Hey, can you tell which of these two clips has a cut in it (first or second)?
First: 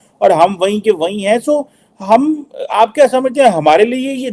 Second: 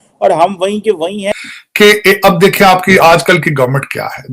second